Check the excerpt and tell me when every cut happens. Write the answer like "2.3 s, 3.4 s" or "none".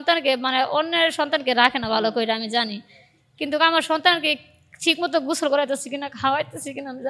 none